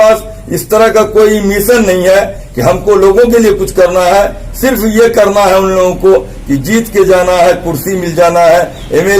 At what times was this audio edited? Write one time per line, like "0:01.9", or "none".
none